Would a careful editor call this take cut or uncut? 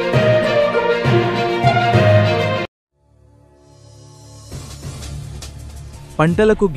uncut